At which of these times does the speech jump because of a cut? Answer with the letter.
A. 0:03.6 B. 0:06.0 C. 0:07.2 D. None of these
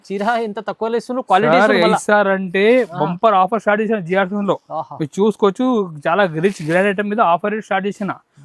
D